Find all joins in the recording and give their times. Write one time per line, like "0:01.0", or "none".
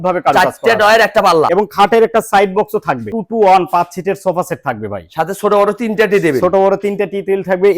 0:01.5
0:03.1